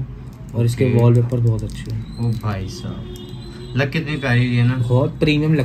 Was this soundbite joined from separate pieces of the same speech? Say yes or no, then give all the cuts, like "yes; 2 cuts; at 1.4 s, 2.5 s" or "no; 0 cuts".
no; 0 cuts